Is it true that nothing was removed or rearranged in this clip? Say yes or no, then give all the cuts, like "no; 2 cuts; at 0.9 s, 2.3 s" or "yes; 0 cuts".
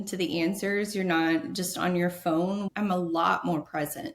no; 1 cut; at 2.7 s